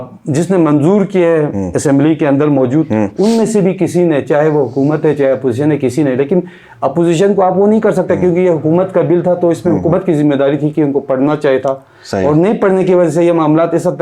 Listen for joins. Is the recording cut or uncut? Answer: uncut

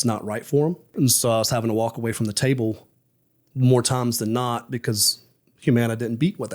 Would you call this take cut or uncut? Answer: cut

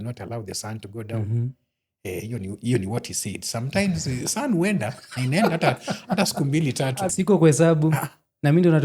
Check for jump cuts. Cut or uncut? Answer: cut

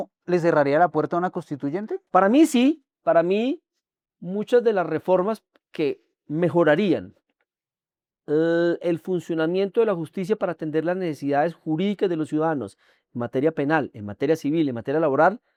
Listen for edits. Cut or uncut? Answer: uncut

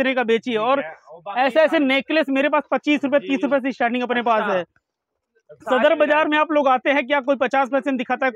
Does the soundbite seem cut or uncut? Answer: uncut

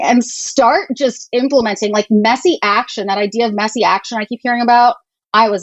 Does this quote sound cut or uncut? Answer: uncut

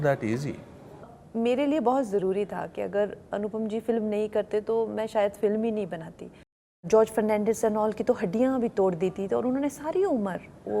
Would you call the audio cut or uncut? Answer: cut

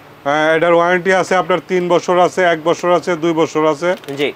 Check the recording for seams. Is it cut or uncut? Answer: uncut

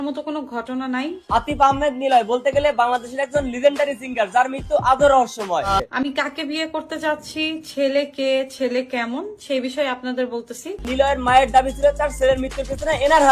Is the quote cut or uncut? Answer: cut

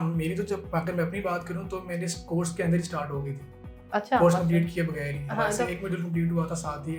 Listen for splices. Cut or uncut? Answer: uncut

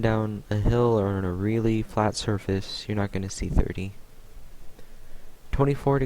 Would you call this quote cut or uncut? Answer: cut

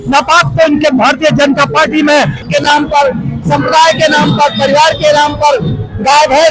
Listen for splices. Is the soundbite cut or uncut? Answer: cut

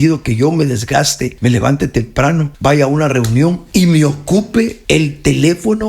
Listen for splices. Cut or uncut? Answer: cut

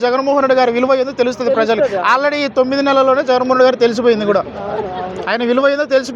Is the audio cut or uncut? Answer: uncut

